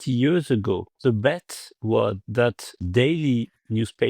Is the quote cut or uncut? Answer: cut